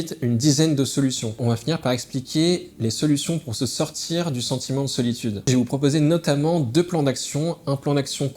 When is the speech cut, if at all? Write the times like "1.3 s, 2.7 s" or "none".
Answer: 1.4 s, 5.5 s

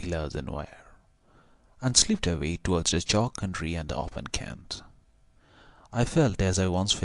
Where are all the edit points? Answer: 1.4 s

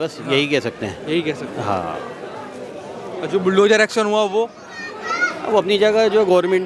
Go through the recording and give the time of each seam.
none

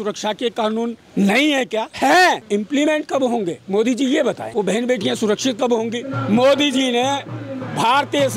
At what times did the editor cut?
1.0 s, 1.9 s, 2.4 s, 4.4 s, 6.1 s

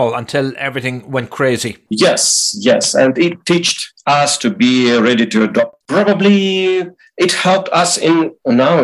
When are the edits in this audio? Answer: 5.8 s

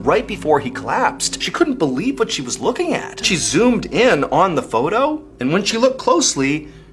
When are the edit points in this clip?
1.4 s, 3.2 s

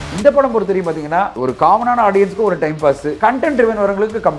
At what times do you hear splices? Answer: 1.3 s, 3.1 s

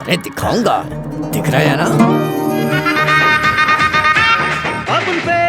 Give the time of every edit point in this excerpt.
3.1 s

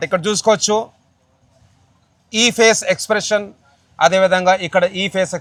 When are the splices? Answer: none

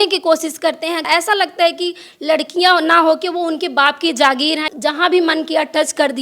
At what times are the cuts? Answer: 1.0 s, 4.7 s

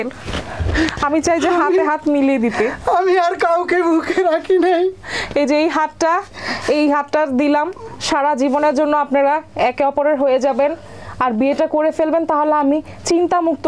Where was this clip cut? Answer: none

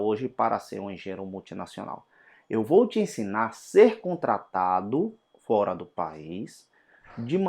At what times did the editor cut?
none

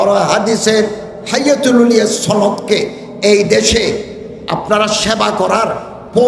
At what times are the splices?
none

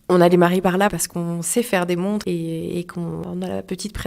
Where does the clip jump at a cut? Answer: 0.9 s, 2.2 s, 3.2 s

